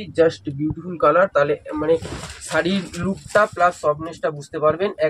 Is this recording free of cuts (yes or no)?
yes